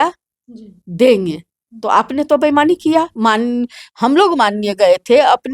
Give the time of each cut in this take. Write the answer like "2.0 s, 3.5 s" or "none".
3.1 s